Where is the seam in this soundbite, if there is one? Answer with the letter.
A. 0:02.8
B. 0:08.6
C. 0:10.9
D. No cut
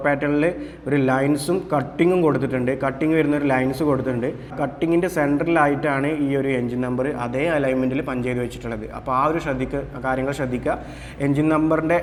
D